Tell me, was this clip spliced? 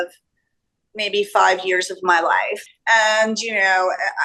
yes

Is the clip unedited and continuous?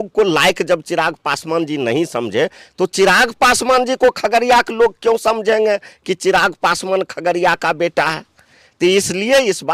yes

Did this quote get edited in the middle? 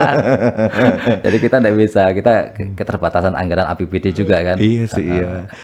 no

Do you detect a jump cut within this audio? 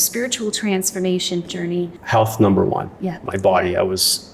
yes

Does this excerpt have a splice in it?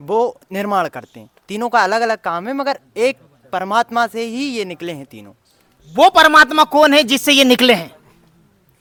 no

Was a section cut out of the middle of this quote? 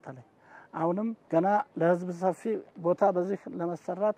yes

